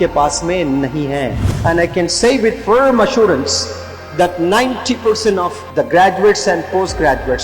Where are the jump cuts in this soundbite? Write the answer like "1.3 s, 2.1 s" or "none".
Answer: 1.5 s, 5.6 s